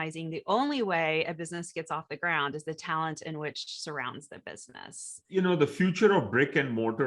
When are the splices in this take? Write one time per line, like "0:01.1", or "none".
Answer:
0:05.3